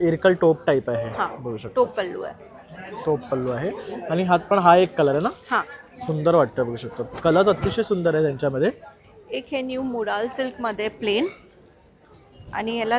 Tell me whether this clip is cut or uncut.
uncut